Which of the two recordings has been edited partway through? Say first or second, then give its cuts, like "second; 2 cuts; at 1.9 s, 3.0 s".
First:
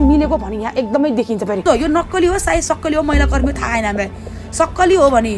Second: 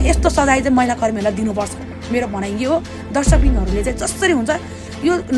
first; 1 cut; at 1.6 s